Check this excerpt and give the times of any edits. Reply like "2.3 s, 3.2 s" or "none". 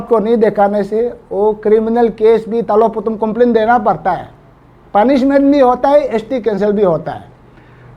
none